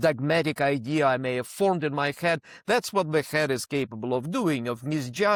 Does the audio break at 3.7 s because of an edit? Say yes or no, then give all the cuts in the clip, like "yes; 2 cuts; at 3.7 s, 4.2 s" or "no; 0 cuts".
no; 0 cuts